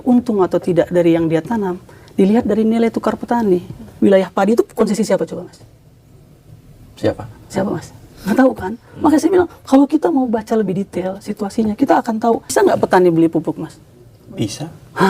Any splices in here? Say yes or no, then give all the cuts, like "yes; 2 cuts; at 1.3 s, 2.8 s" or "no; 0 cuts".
yes; 2 cuts; at 3.8 s, 12.5 s